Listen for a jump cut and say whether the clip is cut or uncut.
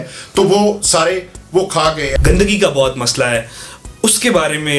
cut